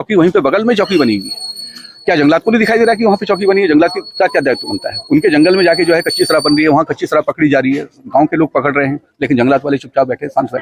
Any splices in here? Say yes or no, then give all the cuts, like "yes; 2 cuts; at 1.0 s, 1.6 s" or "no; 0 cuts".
no; 0 cuts